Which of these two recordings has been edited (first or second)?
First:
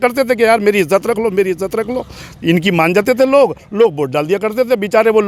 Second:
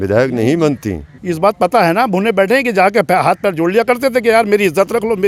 second